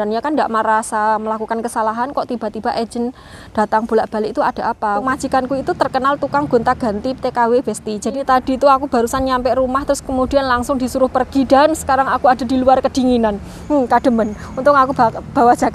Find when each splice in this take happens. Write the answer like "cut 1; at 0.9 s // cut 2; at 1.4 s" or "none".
cut 1; at 5.0 s // cut 2; at 8.2 s